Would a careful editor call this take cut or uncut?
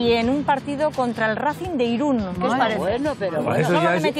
uncut